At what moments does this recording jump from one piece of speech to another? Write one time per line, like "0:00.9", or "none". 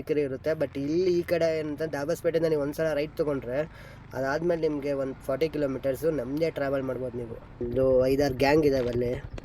0:07.6